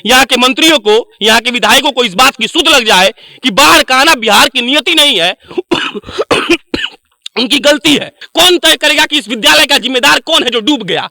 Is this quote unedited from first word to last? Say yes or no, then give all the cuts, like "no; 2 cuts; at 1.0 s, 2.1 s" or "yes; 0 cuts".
no; 1 cut; at 8.2 s